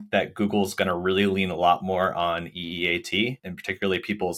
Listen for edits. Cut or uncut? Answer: uncut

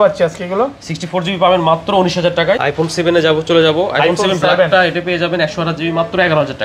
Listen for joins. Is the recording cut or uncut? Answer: cut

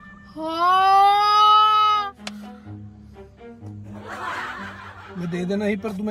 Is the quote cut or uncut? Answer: uncut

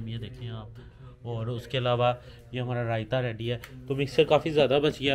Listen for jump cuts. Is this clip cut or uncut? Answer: uncut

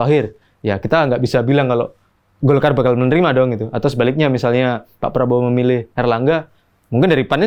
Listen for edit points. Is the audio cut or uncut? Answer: uncut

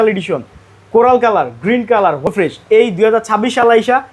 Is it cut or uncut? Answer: cut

